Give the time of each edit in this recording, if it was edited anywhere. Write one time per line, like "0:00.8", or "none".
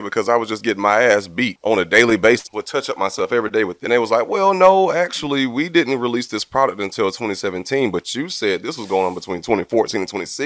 0:01.5
0:02.5
0:03.8